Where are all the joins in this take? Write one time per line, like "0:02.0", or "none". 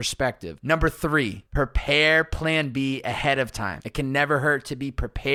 none

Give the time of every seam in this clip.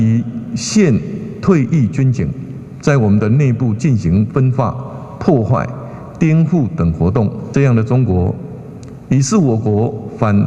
0:07.4

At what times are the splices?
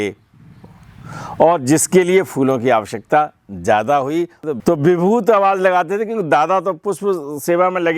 0:04.4

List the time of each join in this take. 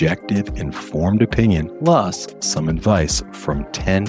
0:01.7

